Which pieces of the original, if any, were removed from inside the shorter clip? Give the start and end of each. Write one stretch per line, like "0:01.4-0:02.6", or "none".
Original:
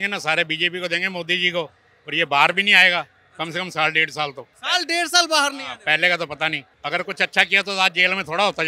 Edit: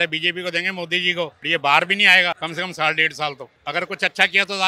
0:01.8-0:02.1
0:03.1-0:03.4
0:04.5-0:06.7